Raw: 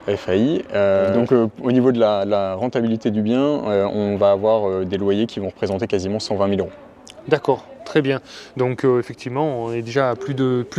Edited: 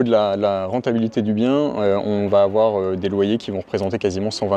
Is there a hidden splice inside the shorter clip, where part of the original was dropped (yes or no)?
no